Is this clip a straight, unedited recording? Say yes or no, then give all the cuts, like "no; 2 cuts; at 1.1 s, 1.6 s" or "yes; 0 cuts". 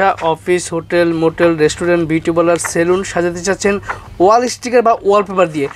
yes; 0 cuts